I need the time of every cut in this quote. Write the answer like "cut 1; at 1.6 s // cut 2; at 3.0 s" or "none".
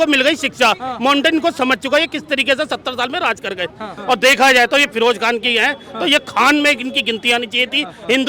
cut 1; at 3.9 s